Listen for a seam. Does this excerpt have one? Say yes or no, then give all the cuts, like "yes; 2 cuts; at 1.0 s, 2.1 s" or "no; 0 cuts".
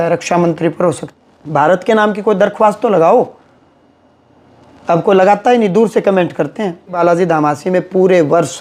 yes; 2 cuts; at 1.1 s, 7.0 s